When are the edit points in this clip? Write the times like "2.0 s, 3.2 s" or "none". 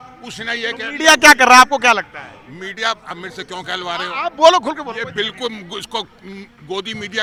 none